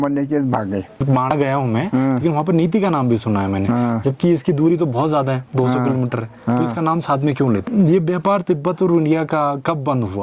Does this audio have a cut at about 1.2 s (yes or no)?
yes